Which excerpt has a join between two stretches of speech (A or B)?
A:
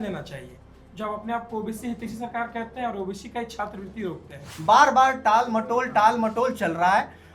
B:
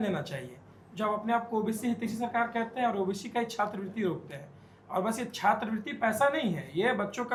A